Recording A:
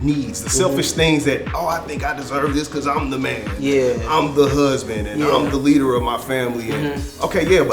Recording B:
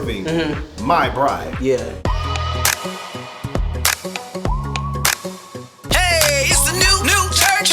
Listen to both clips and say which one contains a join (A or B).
B